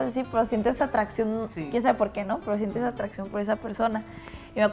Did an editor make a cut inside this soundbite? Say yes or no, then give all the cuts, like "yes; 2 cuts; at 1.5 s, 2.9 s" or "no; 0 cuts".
no; 0 cuts